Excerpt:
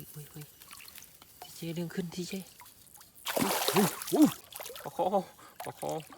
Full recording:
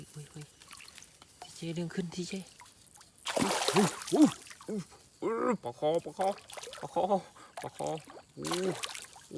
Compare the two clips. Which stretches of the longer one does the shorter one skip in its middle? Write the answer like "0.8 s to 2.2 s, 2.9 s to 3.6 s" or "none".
4.5 s to 6.5 s